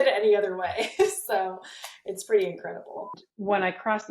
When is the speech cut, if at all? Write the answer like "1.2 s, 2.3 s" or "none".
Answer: 3.2 s